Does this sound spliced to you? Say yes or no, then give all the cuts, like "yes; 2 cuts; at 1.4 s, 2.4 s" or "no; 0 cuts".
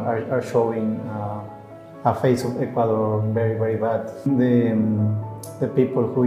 yes; 1 cut; at 4.3 s